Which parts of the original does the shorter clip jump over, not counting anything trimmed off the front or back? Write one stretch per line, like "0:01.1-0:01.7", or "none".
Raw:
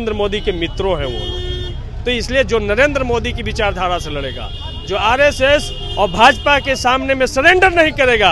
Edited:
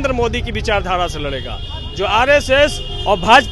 none